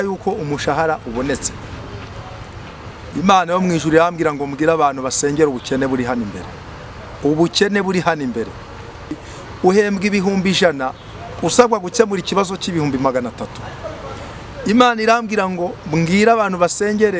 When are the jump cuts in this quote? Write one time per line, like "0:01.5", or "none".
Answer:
0:09.2